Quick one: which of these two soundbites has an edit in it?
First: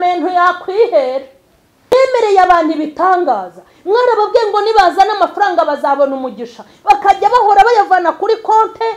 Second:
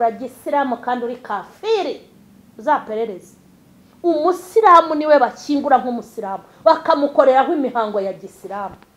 first; 1 cut; at 1.9 s

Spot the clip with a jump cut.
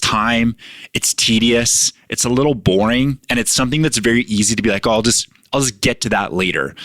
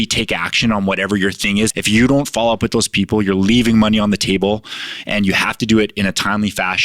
second; 1 cut; at 1.7 s

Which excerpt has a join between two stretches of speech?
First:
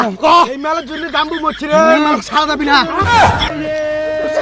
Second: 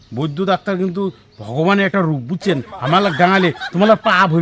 first; 1 cut; at 3.5 s

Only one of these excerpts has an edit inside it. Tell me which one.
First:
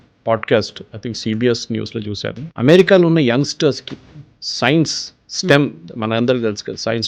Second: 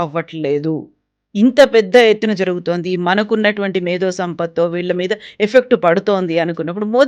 first; 1 cut; at 2.4 s

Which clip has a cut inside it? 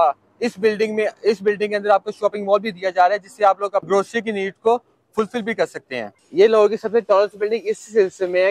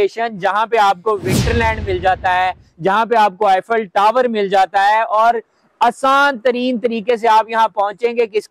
first; 2 cuts; at 3.9 s, 6.2 s

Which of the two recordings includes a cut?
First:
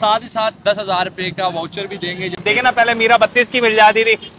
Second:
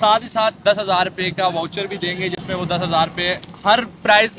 first; 1 cut; at 2.4 s

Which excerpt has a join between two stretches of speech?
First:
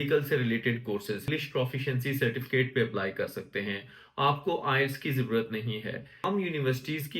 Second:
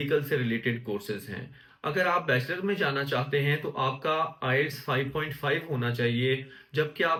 first; 2 cuts; at 1.2 s, 6.2 s

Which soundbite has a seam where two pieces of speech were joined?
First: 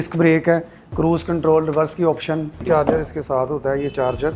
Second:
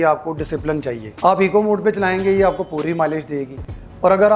first; 1 cut; at 2.6 s

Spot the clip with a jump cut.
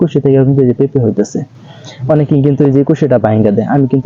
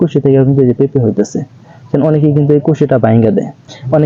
first; 1 cut; at 1.8 s

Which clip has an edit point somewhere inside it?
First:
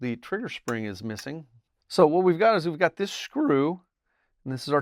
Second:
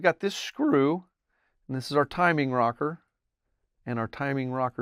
first; 1 cut; at 1.6 s

